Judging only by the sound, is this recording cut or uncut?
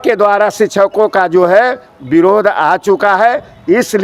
uncut